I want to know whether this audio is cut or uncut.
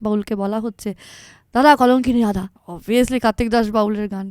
cut